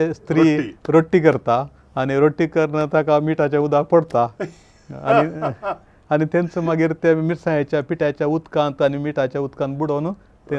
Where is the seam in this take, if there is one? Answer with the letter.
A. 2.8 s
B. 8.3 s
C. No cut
C